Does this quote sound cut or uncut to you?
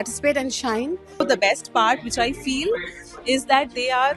cut